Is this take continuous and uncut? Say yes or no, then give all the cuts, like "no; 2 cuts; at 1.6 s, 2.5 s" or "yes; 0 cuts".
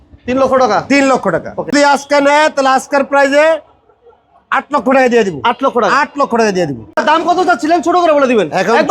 no; 2 cuts; at 1.7 s, 6.9 s